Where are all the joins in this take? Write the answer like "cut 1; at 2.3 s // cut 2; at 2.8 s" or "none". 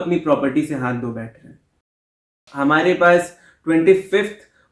cut 1; at 1.9 s